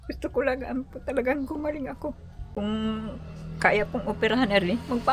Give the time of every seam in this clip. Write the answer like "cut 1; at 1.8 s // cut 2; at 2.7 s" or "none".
cut 1; at 2.3 s